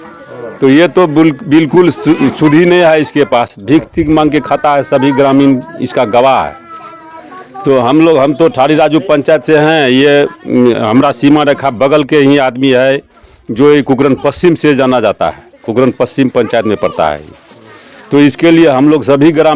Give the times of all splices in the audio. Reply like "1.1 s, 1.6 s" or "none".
none